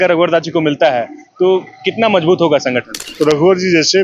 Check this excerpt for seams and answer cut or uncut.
cut